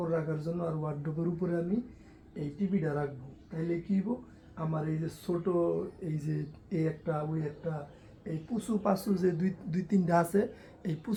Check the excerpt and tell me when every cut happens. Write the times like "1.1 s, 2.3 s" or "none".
none